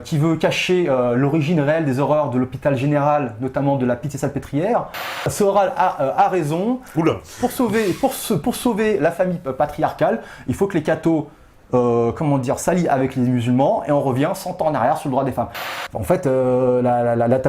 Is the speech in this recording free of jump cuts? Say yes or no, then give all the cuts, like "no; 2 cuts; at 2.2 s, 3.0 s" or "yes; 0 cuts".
no; 2 cuts; at 5.2 s, 15.7 s